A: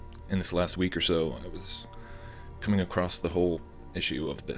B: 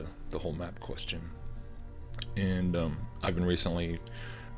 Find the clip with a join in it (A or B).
B